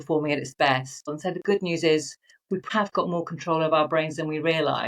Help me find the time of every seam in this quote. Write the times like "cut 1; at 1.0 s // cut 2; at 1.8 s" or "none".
cut 1; at 1.1 s // cut 2; at 2.7 s